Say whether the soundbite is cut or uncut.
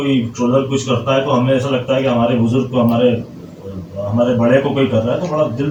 uncut